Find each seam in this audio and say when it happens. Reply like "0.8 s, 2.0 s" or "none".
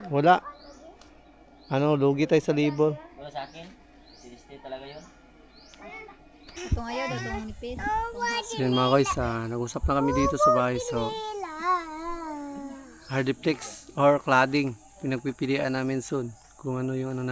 6.8 s

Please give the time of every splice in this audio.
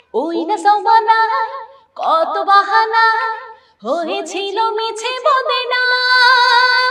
none

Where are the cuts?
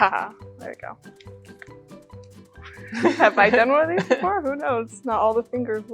none

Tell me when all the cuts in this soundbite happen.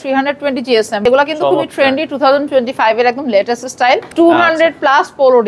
1.0 s, 4.1 s

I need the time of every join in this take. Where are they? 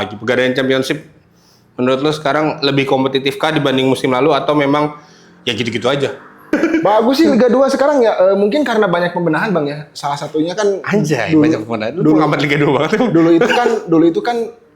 6.5 s

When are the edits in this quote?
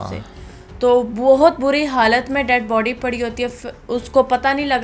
none

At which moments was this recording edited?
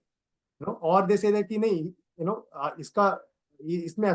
none

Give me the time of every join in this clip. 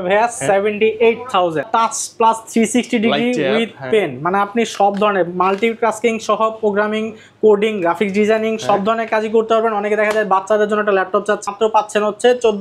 1.7 s, 11.4 s

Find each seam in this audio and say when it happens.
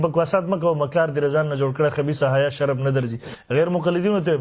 3.3 s

